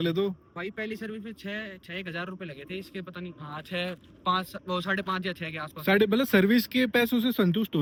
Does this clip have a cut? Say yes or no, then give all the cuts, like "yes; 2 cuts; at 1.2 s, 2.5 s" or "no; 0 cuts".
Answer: no; 0 cuts